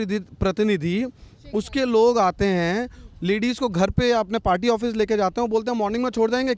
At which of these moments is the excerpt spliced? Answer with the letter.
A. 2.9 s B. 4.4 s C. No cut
C